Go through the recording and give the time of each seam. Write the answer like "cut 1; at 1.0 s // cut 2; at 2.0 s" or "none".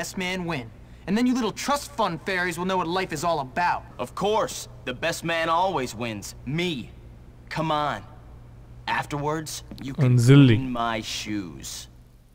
none